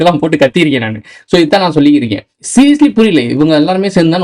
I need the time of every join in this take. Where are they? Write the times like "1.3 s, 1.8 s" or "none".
2.3 s